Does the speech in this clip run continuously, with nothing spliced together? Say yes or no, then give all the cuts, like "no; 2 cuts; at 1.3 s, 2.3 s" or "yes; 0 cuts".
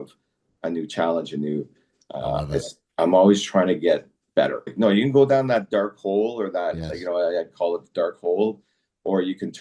no; 1 cut; at 4.7 s